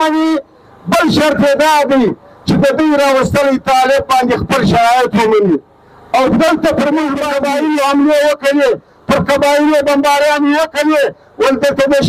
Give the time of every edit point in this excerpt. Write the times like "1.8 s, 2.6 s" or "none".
7.3 s

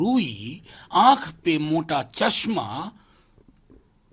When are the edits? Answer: none

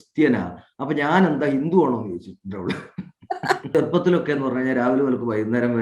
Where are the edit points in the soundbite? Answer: 3.7 s

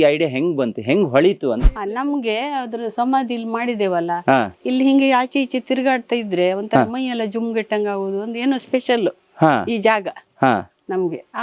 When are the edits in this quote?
1.7 s

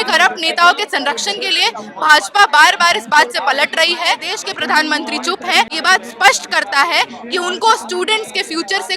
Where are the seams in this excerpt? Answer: 4.3 s, 5.7 s

